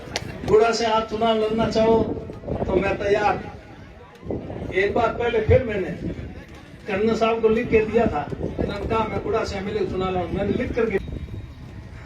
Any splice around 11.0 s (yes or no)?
yes